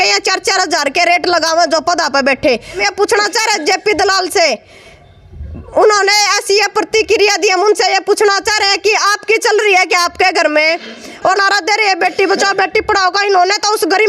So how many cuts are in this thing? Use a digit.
2